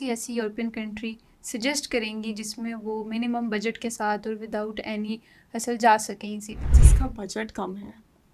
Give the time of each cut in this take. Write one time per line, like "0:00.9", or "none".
0:06.8